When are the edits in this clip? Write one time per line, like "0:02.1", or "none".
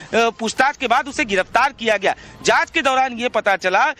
0:02.0